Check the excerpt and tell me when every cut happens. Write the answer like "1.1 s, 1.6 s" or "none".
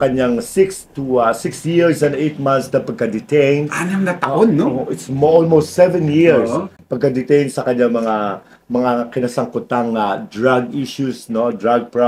none